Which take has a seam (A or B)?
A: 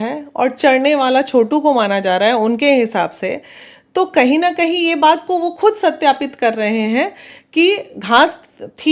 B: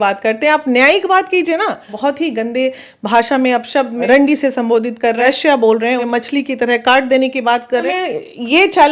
B